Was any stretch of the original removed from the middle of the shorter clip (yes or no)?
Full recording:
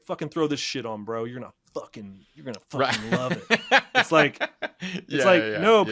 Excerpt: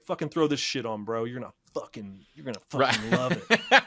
no